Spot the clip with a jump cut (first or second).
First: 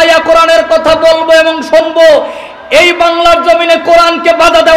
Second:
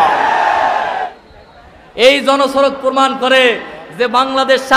second